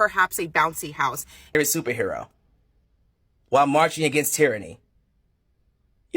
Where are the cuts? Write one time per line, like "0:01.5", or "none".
0:01.5